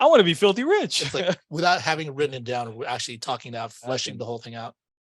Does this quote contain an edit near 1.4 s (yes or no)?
yes